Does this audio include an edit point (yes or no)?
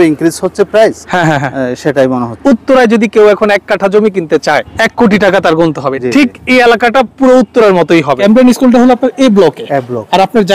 yes